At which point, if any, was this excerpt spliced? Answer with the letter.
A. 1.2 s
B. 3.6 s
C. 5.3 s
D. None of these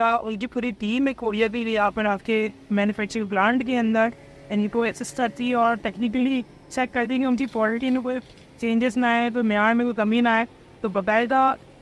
D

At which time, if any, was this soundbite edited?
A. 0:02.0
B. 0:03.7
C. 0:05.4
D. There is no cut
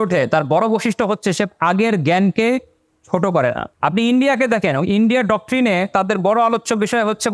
B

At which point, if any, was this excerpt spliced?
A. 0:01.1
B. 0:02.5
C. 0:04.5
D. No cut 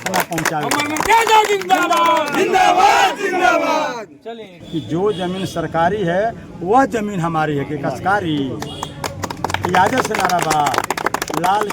C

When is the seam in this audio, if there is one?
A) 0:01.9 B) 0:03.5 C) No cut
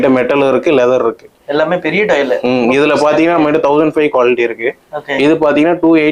C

